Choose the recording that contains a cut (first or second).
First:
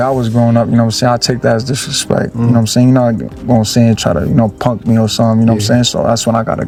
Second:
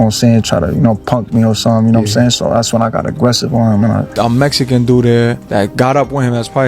second